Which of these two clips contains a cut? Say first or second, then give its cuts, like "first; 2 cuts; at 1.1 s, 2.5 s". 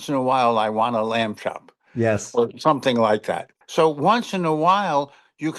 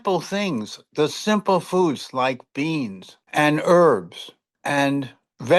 first; 1 cut; at 3.6 s